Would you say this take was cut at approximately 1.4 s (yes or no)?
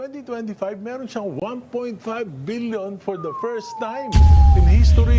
yes